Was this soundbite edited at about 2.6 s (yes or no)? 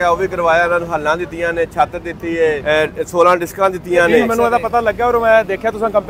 yes